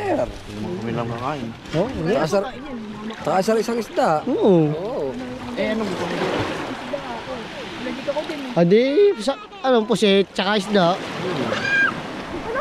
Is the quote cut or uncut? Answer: uncut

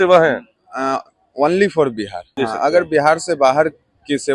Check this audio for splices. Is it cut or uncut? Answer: cut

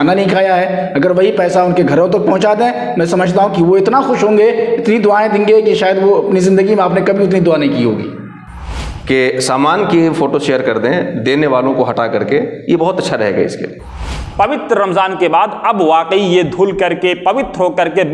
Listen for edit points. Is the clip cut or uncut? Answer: cut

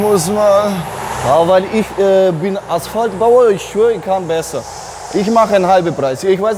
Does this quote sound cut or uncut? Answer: cut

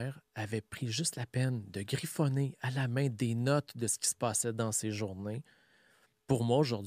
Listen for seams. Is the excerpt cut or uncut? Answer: uncut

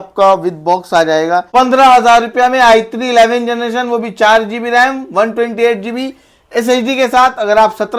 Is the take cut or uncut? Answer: cut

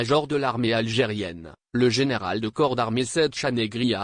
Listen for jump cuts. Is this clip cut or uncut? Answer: cut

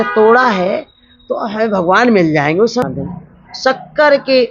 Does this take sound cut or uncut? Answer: cut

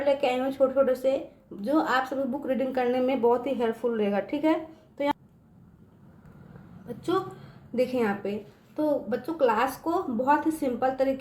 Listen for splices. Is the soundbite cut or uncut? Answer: cut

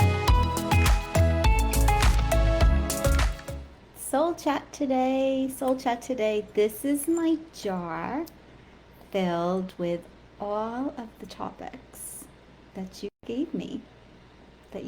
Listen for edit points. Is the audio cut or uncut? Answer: cut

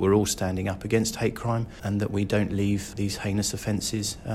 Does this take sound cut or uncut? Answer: cut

